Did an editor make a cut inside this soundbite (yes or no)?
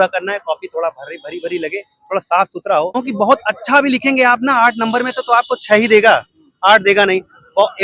yes